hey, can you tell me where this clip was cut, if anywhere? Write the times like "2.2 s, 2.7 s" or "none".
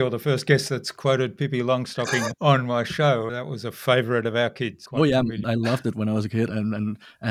2.3 s, 3.4 s, 4.8 s, 5.4 s, 6.5 s